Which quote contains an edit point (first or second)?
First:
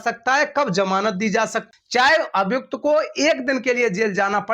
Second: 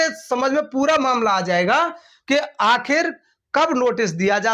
first